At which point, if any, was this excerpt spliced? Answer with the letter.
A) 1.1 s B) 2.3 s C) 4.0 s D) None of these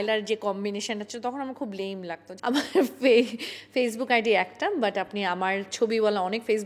B